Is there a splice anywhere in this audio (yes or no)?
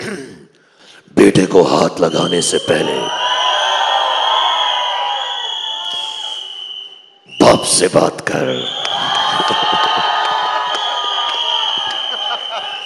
no